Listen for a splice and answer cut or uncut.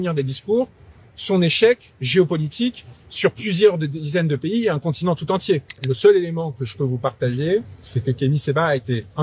cut